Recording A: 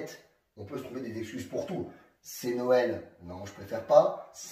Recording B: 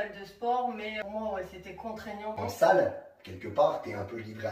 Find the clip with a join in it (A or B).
B